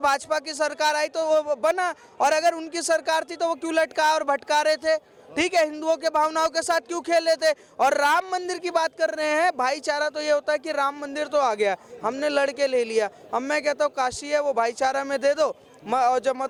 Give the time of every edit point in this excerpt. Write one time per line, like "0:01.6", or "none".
none